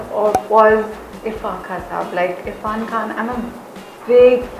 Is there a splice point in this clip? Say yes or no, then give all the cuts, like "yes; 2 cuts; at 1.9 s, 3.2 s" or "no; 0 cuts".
no; 0 cuts